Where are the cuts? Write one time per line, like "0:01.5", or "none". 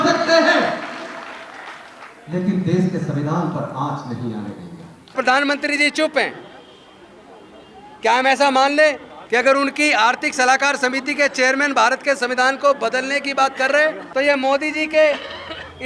0:05.1
0:09.1
0:14.0